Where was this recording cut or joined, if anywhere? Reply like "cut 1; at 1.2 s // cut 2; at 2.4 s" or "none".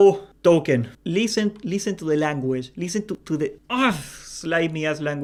none